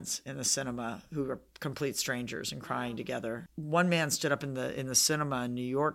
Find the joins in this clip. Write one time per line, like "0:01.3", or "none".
0:03.5